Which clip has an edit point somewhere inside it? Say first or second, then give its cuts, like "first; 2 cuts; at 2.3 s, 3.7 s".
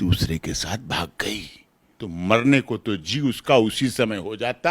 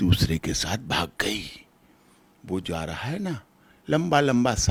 first; 1 cut; at 1.9 s